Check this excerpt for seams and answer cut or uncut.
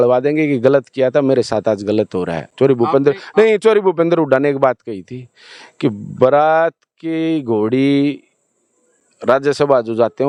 uncut